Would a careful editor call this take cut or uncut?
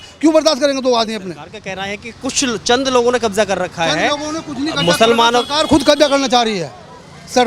uncut